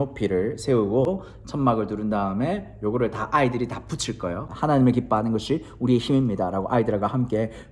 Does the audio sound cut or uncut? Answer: cut